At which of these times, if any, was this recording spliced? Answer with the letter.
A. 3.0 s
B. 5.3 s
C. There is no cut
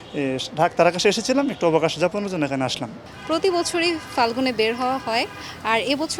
A